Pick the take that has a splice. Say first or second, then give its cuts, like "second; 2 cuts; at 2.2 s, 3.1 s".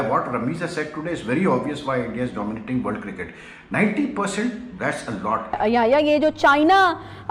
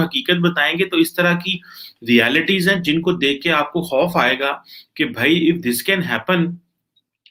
first; 1 cut; at 5.6 s